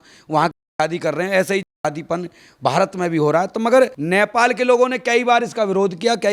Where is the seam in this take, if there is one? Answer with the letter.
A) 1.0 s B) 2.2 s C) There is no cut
C